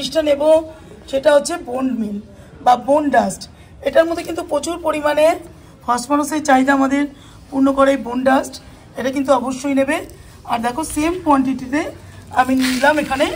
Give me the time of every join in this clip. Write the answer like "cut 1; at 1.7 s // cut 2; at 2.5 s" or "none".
none